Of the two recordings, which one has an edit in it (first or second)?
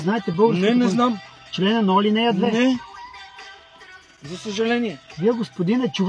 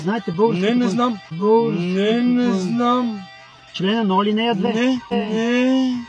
first